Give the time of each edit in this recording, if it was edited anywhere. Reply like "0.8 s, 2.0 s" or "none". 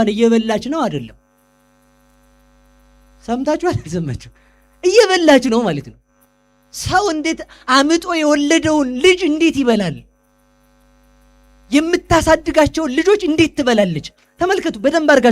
none